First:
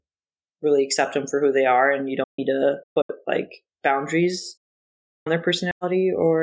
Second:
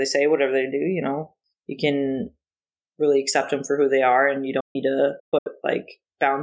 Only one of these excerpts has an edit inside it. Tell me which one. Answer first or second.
second